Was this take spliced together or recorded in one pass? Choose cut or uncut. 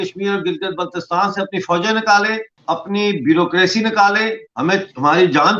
cut